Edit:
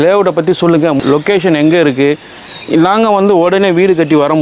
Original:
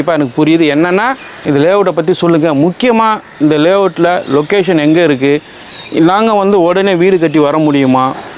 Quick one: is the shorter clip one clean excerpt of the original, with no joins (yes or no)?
no